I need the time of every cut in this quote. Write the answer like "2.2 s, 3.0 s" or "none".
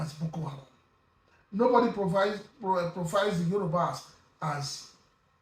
none